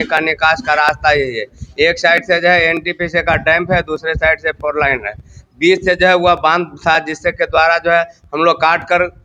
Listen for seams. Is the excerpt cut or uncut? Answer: uncut